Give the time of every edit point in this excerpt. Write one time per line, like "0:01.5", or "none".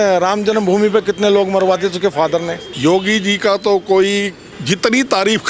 0:02.6
0:04.5